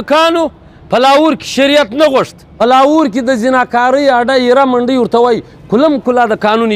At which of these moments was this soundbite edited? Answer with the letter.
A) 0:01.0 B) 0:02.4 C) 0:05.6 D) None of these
B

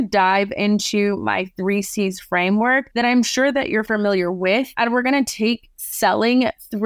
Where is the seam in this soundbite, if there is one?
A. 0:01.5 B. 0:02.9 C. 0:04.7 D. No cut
D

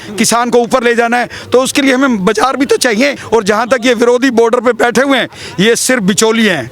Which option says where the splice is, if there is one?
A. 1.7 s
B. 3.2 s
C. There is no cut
B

